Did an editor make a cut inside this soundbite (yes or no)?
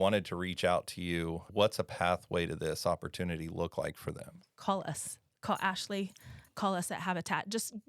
yes